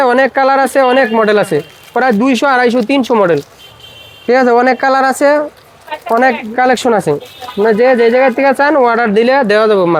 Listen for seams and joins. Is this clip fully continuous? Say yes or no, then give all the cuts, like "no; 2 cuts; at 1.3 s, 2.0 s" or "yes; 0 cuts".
yes; 0 cuts